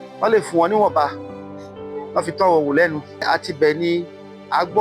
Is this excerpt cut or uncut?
cut